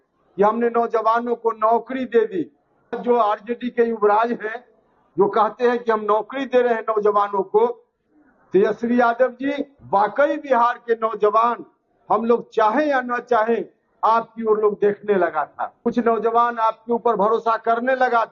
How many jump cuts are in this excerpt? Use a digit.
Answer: 3